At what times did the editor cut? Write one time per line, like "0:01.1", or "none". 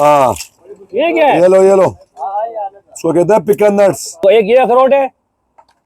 0:04.2